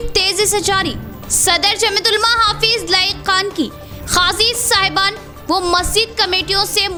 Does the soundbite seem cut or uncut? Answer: uncut